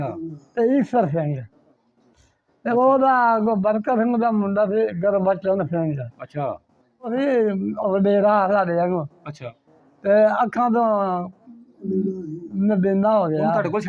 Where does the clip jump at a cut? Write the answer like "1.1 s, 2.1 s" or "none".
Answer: 7.1 s